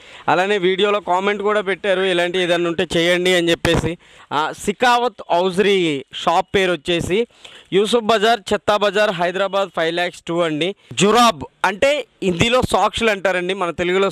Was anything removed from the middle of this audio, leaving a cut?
yes; 2 cuts; at 4.1 s, 10.9 s

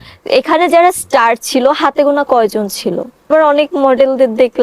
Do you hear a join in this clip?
yes; 1 cut; at 3.2 s

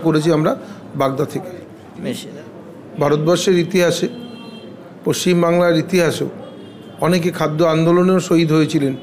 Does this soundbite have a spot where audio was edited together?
yes; 1 cut; at 2.2 s

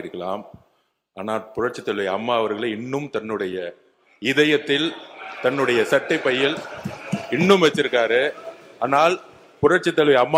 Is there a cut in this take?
no; 0 cuts

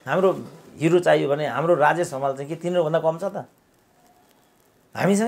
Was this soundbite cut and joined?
no; 0 cuts

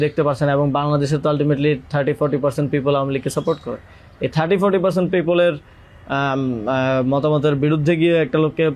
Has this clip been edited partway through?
no; 0 cuts

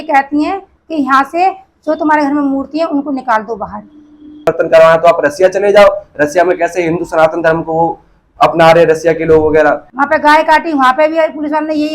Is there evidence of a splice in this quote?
yes; 2 cuts; at 4.5 s, 9.8 s

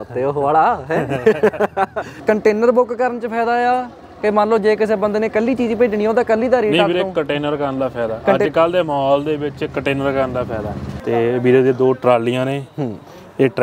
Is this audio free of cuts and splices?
no; 2 cuts; at 2.1 s, 10.9 s

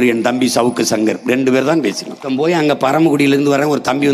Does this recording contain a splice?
yes; 1 cut; at 2.2 s

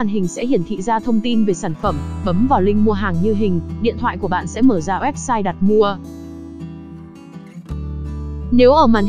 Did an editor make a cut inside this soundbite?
no; 0 cuts

